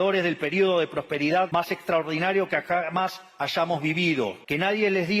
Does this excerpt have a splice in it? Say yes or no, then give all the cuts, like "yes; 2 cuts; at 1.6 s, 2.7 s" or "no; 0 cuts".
yes; 2 cuts; at 1.5 s, 4.4 s